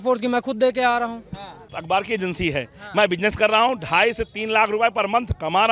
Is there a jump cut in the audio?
yes; 1 cut; at 1.7 s

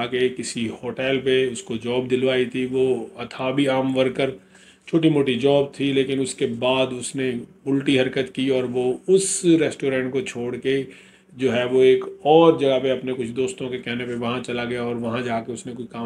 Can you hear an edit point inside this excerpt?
no; 0 cuts

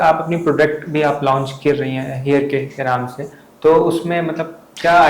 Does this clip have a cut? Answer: no; 0 cuts

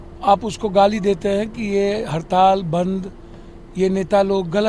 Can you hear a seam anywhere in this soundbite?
no; 0 cuts

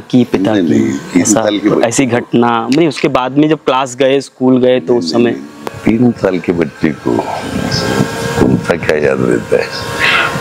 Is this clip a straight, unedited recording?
yes; 0 cuts

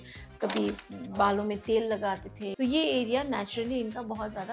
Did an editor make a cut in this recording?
yes; 1 cut; at 2.4 s

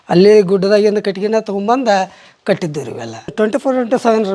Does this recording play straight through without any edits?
no; 1 cut; at 3.3 s

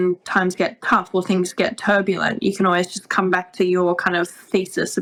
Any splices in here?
no; 0 cuts

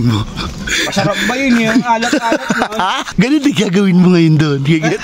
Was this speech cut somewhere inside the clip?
yes; 1 cut; at 3.1 s

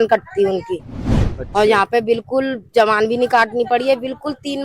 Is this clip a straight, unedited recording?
no; 1 cut; at 1.1 s

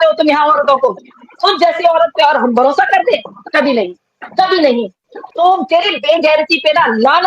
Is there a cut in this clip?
yes; 2 cuts; at 1.3 s, 5.1 s

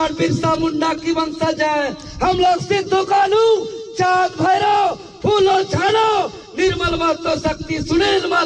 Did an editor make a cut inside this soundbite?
no; 0 cuts

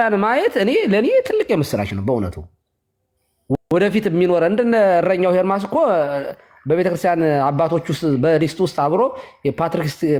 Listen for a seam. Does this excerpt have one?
no; 0 cuts

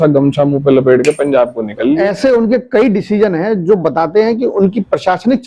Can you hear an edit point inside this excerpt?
yes; 1 cut; at 2.0 s

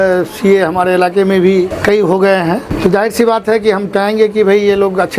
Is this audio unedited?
no; 2 cuts; at 1.7 s, 2.7 s

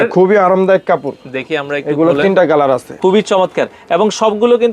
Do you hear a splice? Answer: yes; 1 cut; at 2.9 s

